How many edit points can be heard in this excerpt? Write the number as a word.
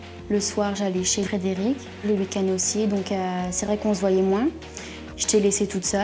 one